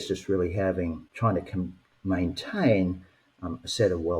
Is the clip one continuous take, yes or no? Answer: no